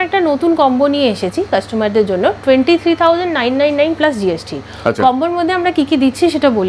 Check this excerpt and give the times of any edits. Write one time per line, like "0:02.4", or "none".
none